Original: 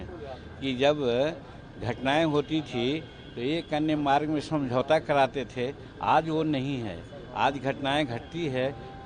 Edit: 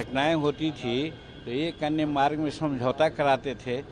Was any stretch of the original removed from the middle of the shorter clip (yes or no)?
no